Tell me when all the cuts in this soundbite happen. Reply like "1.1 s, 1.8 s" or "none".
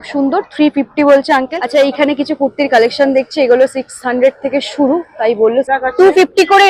1.6 s, 5.7 s